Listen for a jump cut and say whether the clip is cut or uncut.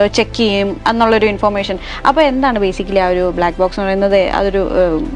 uncut